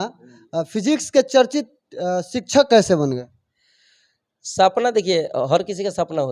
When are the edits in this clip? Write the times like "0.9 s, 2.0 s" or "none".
none